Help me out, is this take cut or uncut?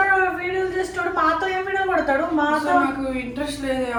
uncut